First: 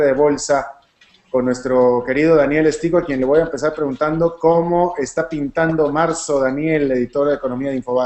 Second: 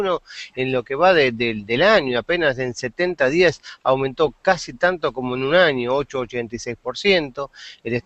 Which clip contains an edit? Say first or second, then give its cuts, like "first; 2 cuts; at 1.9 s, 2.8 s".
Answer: second; 1 cut; at 1.3 s